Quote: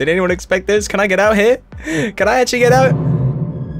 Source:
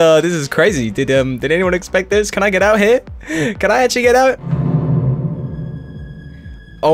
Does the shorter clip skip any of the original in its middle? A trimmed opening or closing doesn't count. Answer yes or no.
yes